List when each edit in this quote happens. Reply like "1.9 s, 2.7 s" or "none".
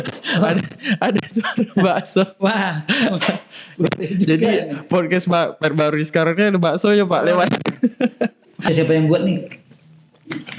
8.7 s